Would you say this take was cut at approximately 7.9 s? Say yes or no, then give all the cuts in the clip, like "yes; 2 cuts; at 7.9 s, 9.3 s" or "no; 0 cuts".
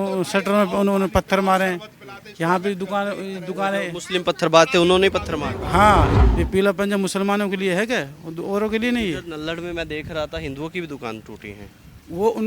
no; 1 cut; at 6.1 s